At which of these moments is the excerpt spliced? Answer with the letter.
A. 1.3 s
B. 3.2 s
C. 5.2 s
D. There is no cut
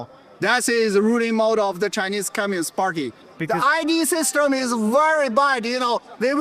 B